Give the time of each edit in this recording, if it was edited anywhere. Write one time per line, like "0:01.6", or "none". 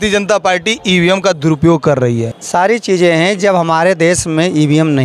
0:02.3